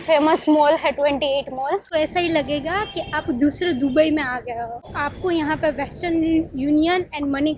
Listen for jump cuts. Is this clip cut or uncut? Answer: cut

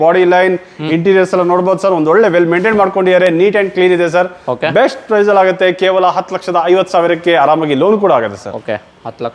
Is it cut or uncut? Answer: uncut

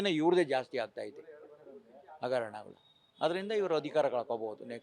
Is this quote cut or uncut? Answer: uncut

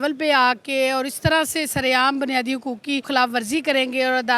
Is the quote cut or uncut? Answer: cut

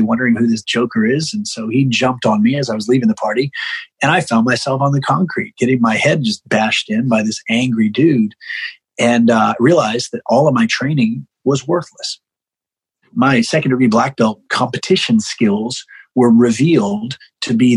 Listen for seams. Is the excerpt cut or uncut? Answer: cut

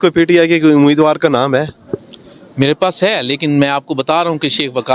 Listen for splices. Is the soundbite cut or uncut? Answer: uncut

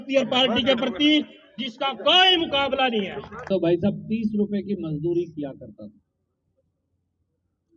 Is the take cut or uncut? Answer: cut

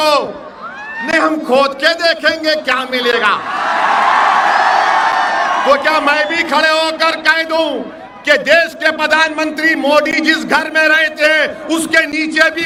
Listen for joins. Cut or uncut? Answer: uncut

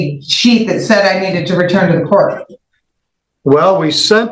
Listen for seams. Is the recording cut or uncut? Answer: uncut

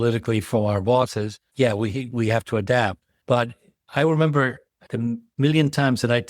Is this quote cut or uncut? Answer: uncut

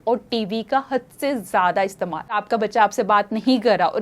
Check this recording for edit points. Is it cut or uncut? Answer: cut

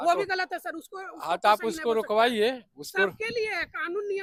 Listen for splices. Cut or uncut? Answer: uncut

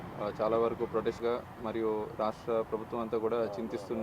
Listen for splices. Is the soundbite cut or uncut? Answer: cut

